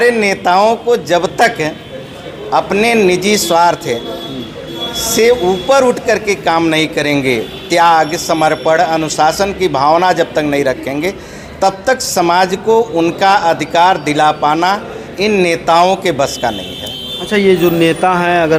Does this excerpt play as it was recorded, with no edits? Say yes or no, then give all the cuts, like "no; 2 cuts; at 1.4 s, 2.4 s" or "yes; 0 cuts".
yes; 0 cuts